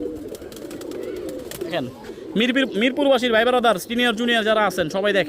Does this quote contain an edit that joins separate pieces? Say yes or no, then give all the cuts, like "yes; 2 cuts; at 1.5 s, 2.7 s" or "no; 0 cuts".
yes; 1 cut; at 1.7 s